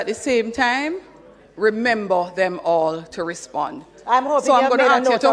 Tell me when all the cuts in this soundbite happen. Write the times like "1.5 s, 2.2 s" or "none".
none